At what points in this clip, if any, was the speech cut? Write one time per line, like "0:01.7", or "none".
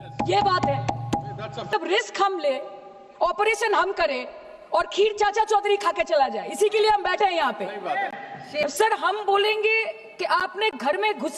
0:01.7
0:08.7